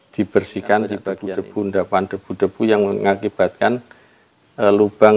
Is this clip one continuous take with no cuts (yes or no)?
no